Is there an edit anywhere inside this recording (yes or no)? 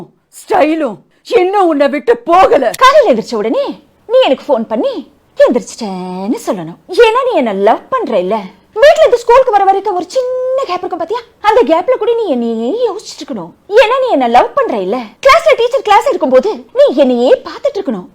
yes